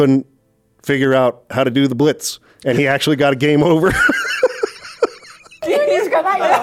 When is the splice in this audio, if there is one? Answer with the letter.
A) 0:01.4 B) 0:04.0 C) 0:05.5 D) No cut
D